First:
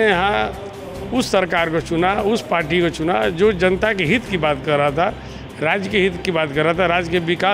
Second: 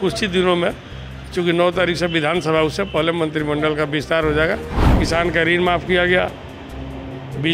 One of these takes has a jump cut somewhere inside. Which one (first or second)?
second